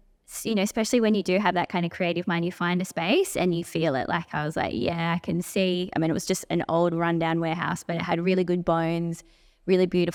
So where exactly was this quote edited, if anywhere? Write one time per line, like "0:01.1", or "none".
none